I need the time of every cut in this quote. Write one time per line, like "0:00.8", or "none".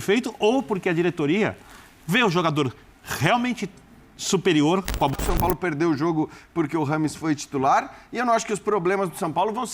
0:05.1